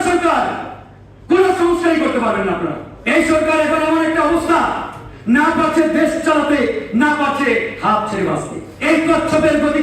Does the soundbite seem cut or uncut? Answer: cut